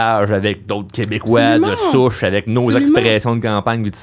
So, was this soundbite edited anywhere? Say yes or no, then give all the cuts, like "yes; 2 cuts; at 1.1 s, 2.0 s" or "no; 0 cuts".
no; 0 cuts